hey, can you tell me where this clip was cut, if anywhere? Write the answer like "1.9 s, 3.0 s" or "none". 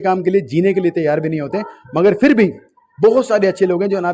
none